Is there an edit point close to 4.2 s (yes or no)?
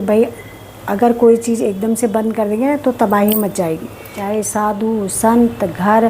yes